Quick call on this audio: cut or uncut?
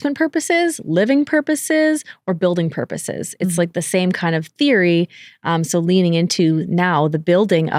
uncut